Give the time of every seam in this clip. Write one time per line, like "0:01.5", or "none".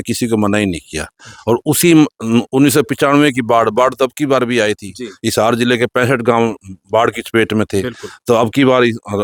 none